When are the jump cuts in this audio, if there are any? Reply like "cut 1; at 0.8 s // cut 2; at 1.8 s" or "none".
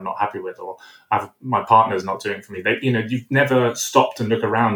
none